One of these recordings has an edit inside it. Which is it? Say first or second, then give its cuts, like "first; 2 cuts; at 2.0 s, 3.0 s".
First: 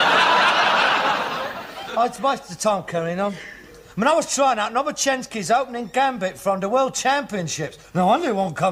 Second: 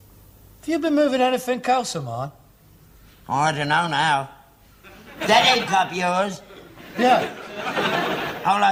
first; 1 cut; at 3.9 s